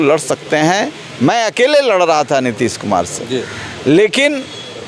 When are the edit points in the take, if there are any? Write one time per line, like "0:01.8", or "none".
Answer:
none